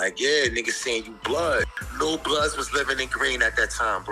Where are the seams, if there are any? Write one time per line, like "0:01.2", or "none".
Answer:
0:01.7